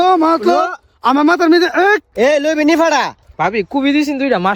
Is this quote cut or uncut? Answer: cut